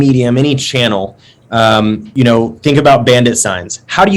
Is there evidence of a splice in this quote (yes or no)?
yes